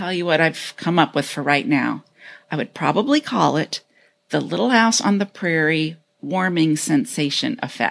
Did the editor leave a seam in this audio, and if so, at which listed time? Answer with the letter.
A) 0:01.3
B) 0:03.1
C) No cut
C